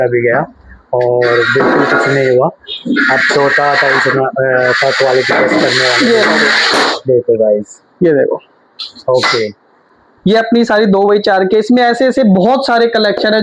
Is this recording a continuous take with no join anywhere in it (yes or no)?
yes